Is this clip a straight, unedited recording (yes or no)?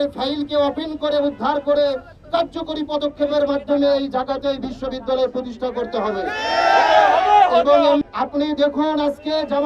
no